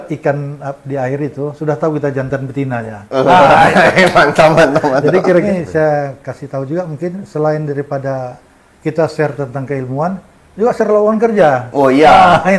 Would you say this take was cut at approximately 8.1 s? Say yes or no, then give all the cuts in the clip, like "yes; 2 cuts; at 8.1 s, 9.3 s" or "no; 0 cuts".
no; 1 cut; at 5.4 s